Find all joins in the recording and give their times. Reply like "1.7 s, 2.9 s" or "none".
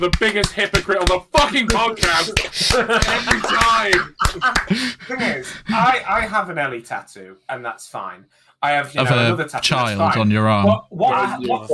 4.7 s